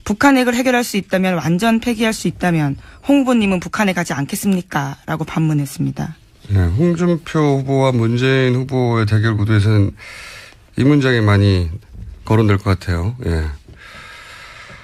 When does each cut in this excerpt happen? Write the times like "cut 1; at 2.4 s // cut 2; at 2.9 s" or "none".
none